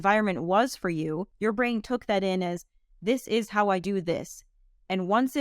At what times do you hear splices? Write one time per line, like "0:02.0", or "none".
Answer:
0:01.3